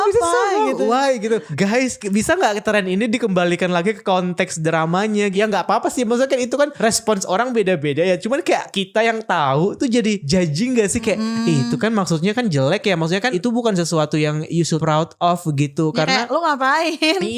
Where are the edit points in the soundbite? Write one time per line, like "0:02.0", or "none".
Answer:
0:01.6
0:05.3
0:06.7
0:08.8
0:10.2
0:13.3
0:14.8
0:16.3

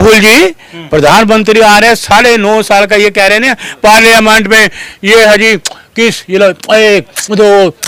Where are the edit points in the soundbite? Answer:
none

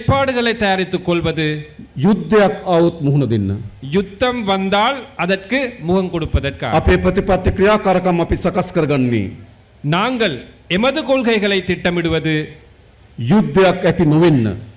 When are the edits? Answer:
none

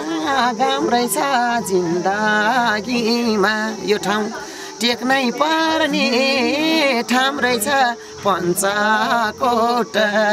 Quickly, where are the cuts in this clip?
none

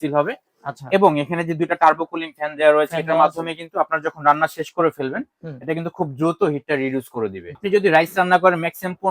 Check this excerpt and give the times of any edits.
0:07.6

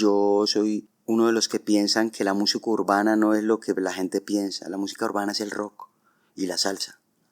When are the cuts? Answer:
0:00.9

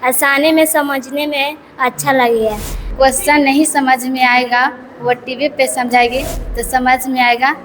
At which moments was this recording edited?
0:02.8

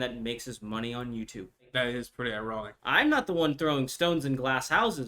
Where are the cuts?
0:01.7
0:02.7

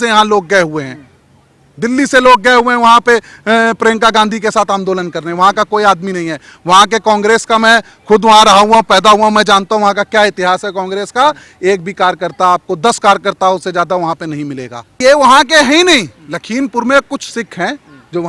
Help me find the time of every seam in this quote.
0:15.0

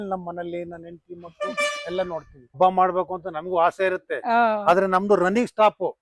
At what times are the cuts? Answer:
0:02.5

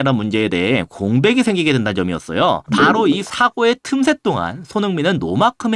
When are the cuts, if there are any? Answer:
0:02.6

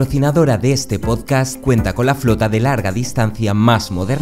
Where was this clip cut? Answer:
none

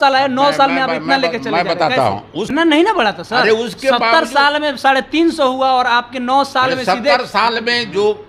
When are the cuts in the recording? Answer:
0:02.6

